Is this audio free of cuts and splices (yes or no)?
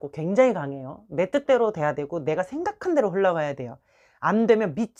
yes